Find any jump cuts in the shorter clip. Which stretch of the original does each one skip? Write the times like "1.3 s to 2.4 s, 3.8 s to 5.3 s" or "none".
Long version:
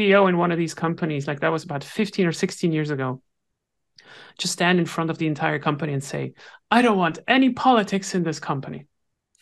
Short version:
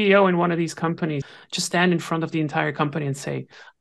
1.3 s to 4.1 s

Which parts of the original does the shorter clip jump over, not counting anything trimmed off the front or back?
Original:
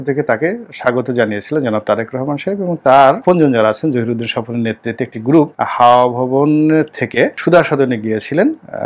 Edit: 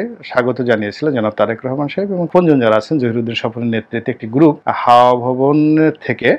2.8 s to 3.2 s

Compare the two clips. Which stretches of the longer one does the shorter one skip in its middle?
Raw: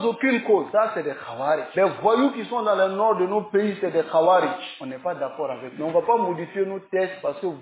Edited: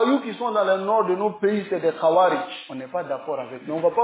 none

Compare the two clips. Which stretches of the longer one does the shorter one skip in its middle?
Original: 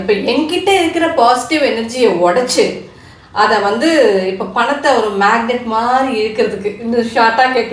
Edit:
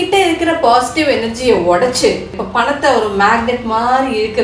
2.9 s to 4.4 s

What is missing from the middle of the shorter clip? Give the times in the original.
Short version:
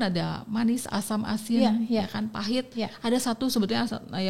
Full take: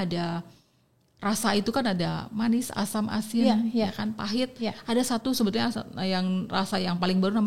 none

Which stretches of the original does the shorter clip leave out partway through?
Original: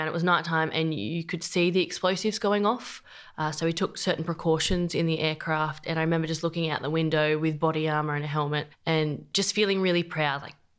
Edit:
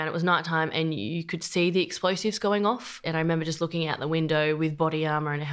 3.0 s to 5.8 s

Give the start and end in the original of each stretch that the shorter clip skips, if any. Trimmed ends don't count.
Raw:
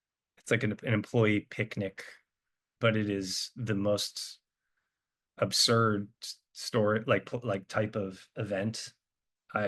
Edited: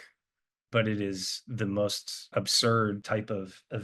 4.2 s to 5.2 s, 6.1 s to 7.7 s

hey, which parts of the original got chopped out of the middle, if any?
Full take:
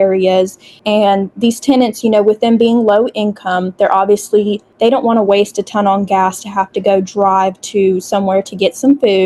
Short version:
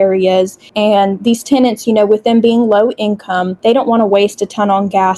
0.9 s to 1.1 s, 3.7 s to 4.7 s

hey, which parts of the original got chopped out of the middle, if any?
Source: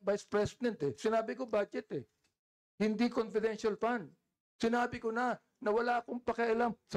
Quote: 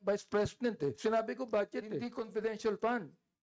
2.2 s to 3.2 s

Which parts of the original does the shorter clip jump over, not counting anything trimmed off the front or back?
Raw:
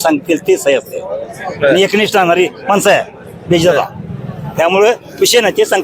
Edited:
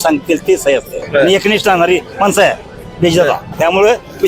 1.0 s to 1.4 s, 4.0 s to 4.5 s

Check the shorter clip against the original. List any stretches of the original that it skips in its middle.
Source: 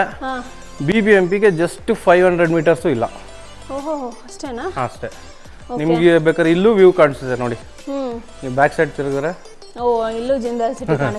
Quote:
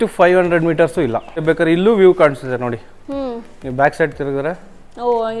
3.3 s to 6.2 s

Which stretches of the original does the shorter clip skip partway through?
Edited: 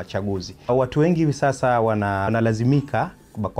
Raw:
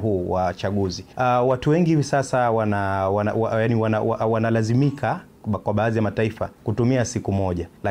1.2 s to 1.4 s, 3.0 s to 4.4 s

